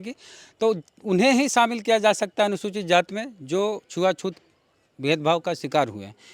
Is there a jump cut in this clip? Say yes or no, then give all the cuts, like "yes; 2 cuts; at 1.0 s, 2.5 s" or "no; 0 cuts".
no; 0 cuts